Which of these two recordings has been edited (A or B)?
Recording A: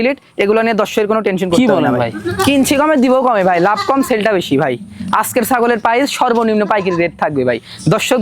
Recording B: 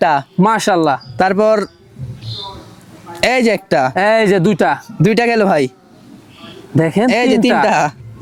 A